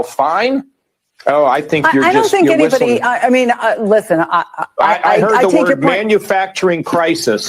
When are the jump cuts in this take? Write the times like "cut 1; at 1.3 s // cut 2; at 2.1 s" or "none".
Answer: cut 1; at 2.7 s